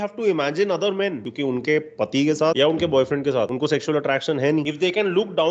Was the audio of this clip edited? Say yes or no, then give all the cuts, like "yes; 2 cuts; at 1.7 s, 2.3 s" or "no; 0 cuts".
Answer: yes; 4 cuts; at 1.3 s, 2.6 s, 3.5 s, 4.7 s